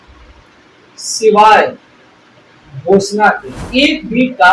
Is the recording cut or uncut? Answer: cut